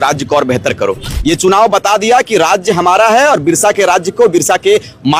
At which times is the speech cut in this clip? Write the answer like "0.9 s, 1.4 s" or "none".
1.1 s